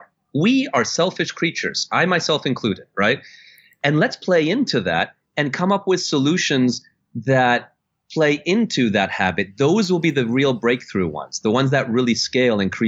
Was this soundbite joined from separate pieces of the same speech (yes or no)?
no